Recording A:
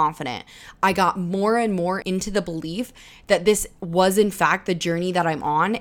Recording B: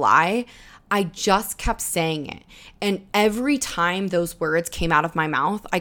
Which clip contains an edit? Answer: A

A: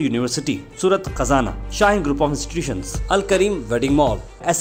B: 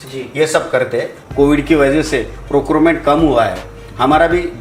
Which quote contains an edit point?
B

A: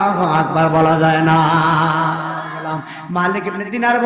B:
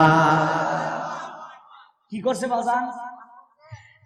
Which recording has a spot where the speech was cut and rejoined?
A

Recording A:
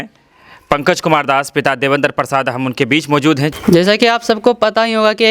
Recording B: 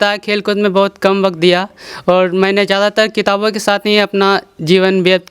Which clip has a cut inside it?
A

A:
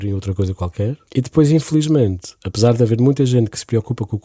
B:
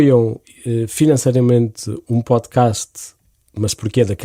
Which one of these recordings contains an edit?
A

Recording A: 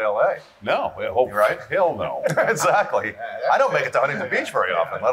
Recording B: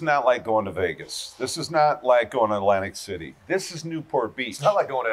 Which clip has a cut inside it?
B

